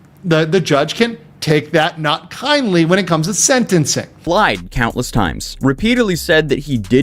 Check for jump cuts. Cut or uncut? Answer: cut